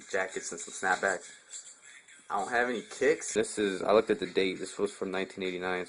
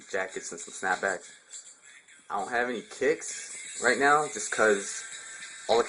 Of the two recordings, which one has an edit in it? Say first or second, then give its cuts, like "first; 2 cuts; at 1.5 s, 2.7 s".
second; 1 cut; at 3.2 s